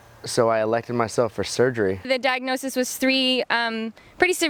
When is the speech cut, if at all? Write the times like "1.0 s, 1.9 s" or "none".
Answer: 2.0 s